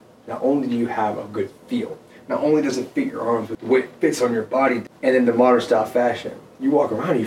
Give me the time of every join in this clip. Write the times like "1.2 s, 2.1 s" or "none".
3.5 s, 4.9 s